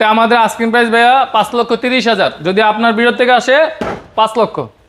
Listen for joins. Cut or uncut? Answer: uncut